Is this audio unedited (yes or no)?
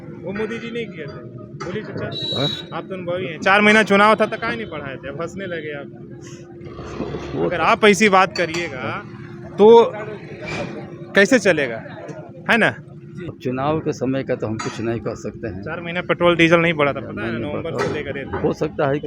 yes